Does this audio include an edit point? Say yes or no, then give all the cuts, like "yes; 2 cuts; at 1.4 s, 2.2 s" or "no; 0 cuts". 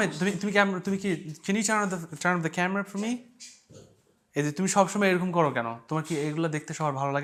no; 0 cuts